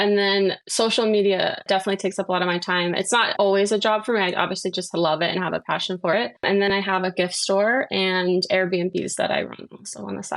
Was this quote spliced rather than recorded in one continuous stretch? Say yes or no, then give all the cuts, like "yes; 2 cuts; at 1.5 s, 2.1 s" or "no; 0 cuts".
yes; 1 cut; at 3.3 s